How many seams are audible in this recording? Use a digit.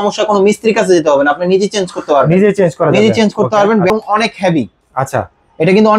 1